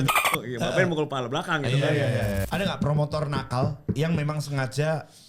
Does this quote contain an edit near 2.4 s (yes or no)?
yes